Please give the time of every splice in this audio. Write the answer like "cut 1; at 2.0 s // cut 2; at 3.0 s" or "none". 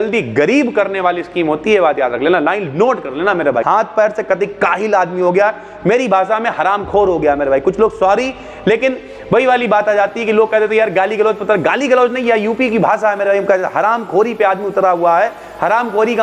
cut 1; at 3.6 s